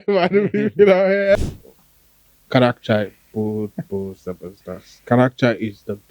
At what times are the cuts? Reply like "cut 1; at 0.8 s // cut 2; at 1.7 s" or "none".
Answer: cut 1; at 1.4 s